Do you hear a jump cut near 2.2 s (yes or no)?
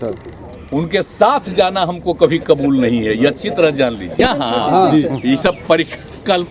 no